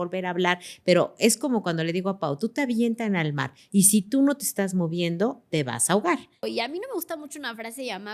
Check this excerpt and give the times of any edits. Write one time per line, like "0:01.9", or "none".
0:06.4